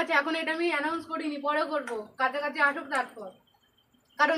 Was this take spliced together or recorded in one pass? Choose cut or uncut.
uncut